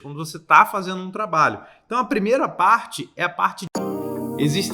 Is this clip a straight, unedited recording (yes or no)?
no